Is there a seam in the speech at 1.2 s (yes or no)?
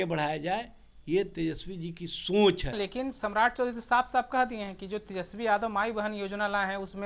no